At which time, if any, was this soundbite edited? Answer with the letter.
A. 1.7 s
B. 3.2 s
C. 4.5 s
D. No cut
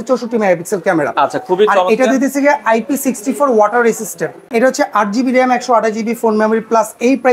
C